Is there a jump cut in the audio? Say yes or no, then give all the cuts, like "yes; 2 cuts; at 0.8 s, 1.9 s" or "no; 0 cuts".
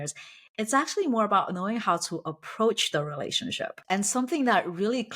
yes; 1 cut; at 3.8 s